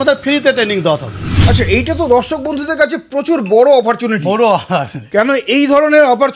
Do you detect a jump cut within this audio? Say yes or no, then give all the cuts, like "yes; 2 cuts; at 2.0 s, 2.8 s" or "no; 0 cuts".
yes; 1 cut; at 1.4 s